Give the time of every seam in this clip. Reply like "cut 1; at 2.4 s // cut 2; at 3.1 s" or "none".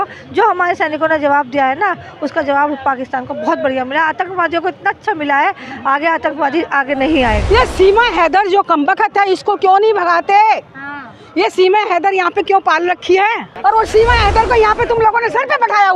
cut 1; at 7.4 s // cut 2; at 13.5 s